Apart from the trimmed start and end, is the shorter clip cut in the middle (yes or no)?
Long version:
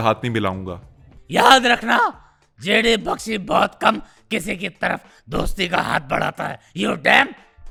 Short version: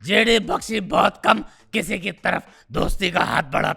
no